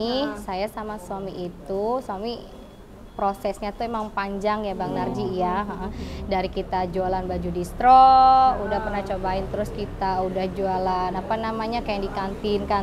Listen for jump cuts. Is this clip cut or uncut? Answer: uncut